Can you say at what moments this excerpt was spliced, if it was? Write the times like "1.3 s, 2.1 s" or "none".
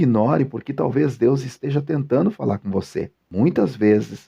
3.2 s

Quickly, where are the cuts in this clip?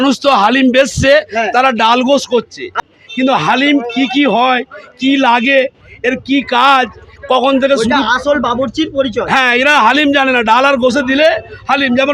none

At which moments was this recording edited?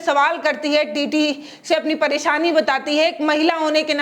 none

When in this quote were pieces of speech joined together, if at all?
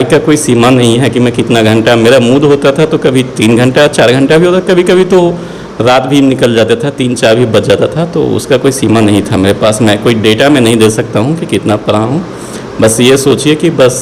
none

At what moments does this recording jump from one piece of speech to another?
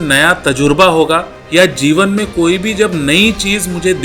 1.4 s

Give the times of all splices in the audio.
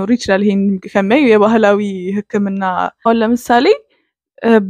3.1 s

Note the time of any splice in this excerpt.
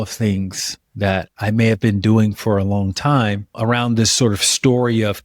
none

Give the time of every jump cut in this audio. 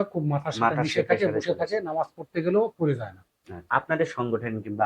3.6 s

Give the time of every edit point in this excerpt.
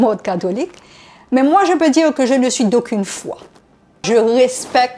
4.1 s

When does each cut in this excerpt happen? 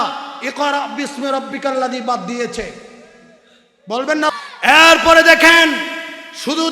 4.3 s

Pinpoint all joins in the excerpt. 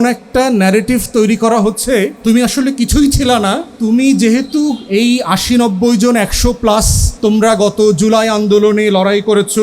2.1 s, 3.7 s, 7.0 s

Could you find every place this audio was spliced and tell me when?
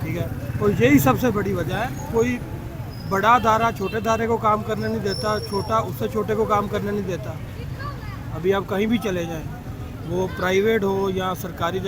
none

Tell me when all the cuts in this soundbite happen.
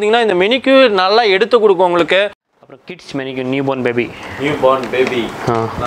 2.4 s

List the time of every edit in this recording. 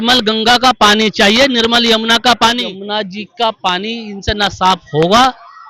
2.7 s

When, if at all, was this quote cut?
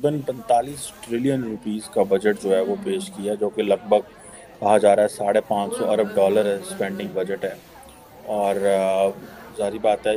none

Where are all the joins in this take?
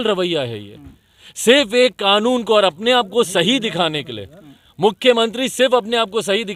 none

